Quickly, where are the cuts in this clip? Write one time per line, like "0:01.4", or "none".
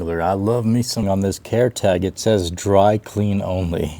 0:01.0